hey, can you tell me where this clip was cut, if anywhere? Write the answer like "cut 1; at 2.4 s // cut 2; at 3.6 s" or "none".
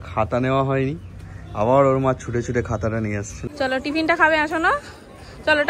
cut 1; at 3.3 s